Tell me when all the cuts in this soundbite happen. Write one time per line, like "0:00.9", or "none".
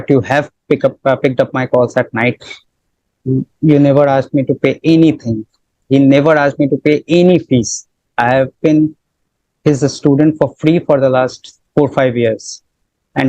0:05.7